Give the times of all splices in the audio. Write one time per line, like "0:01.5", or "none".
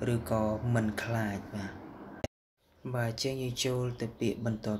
0:02.1